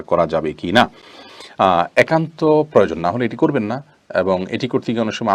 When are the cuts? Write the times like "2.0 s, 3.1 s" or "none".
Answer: none